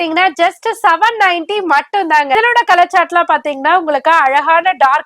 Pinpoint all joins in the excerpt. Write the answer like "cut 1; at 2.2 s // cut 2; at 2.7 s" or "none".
cut 1; at 2.4 s